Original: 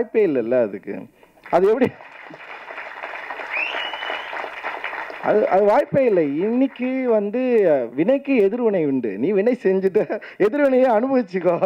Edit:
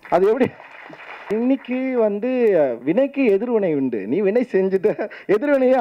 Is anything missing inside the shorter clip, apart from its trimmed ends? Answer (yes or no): yes